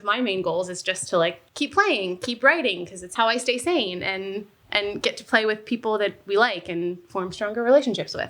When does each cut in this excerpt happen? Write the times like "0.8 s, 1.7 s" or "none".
1.4 s, 3.1 s